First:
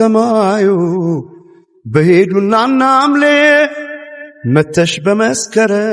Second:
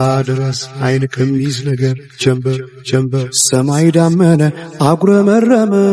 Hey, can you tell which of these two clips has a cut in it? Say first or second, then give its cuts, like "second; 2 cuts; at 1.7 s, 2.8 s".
second; 1 cut; at 3.4 s